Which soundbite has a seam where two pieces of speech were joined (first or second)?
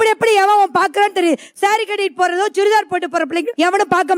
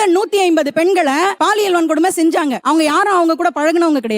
second